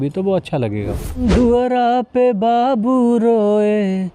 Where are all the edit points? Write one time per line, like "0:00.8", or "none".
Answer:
0:01.2